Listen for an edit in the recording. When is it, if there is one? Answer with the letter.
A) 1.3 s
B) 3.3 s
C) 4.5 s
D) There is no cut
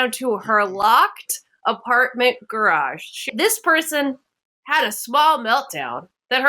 B